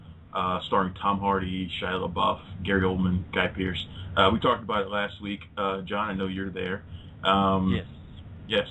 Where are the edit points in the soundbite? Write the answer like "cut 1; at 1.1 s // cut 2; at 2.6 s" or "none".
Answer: cut 1; at 1.6 s